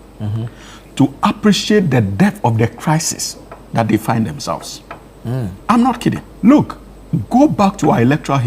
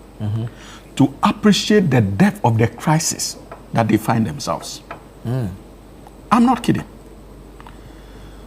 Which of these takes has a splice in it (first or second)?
first